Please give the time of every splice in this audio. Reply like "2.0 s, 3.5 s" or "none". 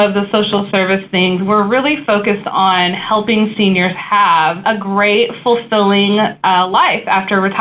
4.6 s